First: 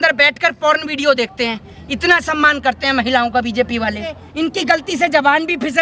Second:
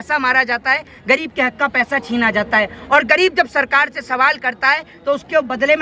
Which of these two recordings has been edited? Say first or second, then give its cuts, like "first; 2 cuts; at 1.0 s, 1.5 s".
first; 1 cut; at 4.2 s